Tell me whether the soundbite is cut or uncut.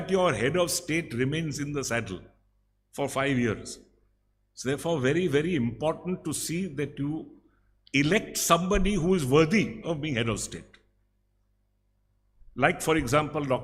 uncut